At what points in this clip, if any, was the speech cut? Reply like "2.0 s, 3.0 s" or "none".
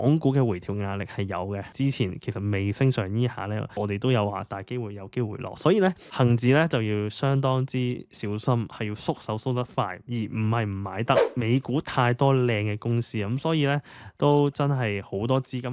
1.7 s, 3.7 s, 6.0 s, 11.3 s